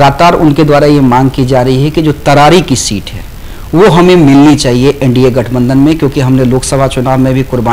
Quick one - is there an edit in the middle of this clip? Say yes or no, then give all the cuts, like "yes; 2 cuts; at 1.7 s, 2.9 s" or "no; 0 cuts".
no; 0 cuts